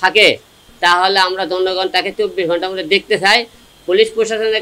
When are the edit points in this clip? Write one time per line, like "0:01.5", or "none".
none